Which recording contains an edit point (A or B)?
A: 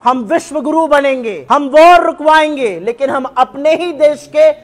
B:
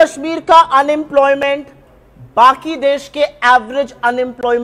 A